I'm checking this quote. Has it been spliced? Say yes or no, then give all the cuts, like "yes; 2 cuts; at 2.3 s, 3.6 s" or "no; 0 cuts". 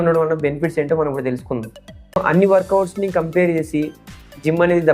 yes; 1 cut; at 2.2 s